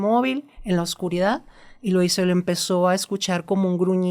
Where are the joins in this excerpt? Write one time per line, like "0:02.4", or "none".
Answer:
none